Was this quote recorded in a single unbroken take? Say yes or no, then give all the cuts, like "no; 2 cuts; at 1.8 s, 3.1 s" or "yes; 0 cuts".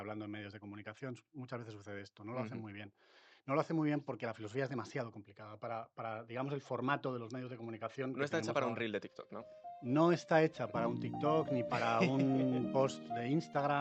yes; 0 cuts